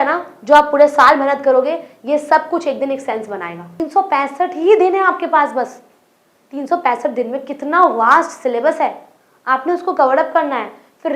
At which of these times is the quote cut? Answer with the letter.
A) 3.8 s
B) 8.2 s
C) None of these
A